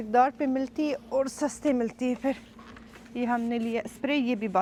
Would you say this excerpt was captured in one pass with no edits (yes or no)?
yes